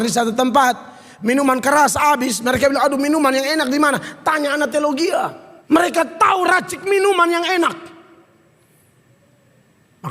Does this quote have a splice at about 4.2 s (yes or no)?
no